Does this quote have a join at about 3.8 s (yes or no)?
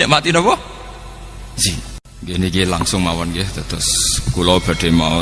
no